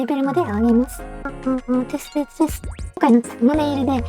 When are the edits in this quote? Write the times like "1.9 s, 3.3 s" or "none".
1.3 s, 2.8 s